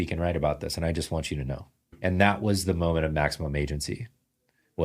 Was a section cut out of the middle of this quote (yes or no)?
yes